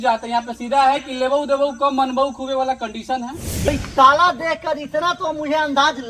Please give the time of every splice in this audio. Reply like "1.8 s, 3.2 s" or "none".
3.7 s